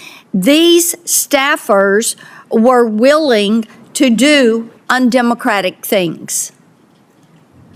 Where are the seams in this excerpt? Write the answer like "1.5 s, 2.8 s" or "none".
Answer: none

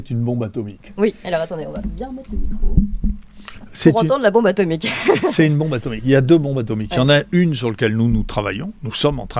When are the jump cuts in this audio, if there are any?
none

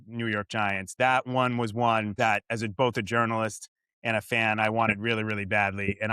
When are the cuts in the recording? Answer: 2.1 s

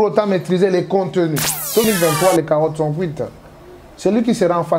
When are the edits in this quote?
1.8 s

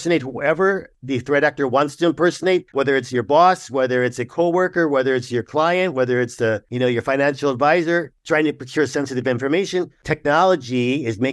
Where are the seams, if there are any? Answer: 1.0 s, 2.7 s, 6.7 s, 8.1 s, 10.0 s

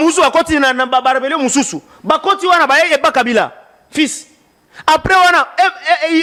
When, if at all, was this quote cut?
none

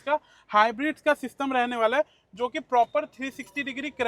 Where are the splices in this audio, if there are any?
none

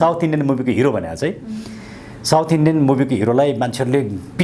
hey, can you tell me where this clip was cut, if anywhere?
none

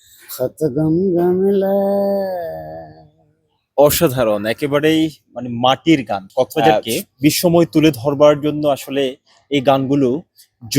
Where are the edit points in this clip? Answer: 6.6 s

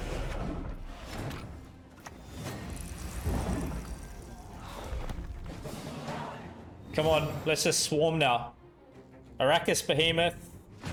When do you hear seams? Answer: none

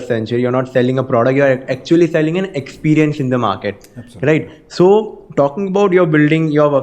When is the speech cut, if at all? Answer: none

